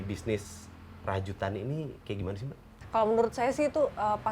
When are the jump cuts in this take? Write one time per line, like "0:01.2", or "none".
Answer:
0:02.7